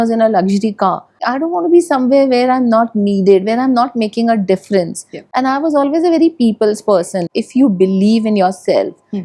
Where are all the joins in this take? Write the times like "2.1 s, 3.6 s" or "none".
1.2 s, 7.3 s